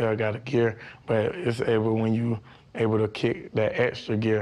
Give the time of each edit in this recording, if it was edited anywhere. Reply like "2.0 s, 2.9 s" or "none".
2.9 s